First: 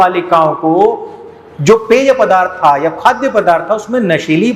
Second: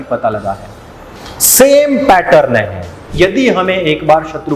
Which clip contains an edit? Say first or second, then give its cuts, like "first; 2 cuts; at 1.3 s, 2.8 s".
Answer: second; 1 cut; at 3.1 s